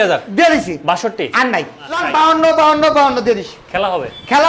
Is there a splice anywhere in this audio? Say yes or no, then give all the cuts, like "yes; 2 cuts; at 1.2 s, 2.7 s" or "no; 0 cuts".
yes; 1 cut; at 2.1 s